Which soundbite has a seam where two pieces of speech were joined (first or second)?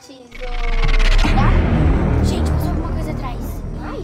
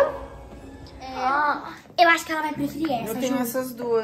second